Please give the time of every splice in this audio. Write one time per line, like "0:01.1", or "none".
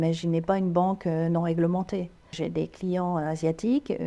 0:02.3